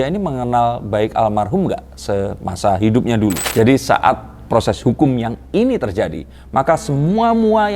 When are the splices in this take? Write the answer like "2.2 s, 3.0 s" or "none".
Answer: 3.4 s